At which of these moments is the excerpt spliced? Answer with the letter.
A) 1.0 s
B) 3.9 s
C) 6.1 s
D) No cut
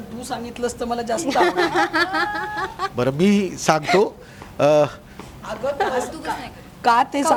D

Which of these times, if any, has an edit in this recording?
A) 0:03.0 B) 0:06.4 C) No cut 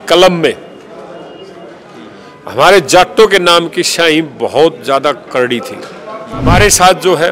B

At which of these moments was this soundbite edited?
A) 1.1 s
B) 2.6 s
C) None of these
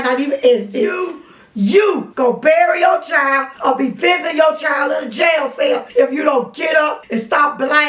A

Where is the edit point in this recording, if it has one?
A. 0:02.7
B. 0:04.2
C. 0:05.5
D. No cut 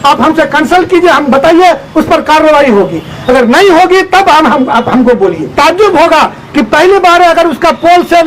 C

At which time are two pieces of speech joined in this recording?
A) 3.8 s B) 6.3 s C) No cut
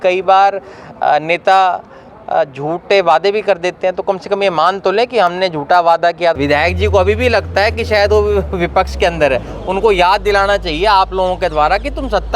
B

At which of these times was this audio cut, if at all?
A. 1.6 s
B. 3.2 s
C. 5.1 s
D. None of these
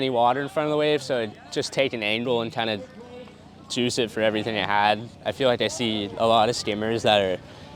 C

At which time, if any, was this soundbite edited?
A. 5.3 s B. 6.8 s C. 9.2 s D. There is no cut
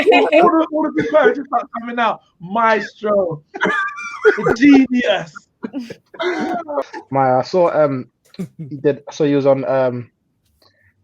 B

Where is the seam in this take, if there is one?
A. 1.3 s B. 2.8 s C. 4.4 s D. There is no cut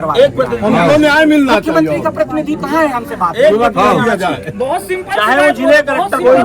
D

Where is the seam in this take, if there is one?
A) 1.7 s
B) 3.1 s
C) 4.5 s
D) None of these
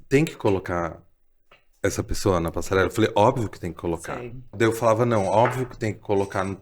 C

